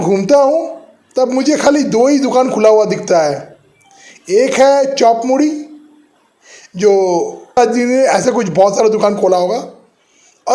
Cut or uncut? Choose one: cut